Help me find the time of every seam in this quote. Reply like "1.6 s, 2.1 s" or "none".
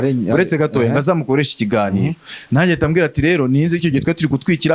none